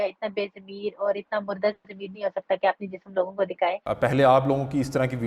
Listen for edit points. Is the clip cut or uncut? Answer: cut